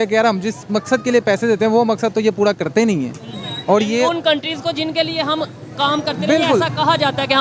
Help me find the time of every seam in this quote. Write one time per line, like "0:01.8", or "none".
none